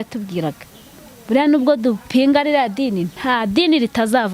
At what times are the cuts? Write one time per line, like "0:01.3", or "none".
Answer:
none